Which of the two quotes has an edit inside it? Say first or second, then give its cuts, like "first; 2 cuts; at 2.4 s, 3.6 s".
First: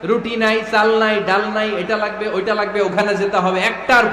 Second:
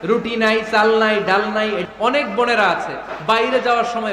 second; 1 cut; at 1.8 s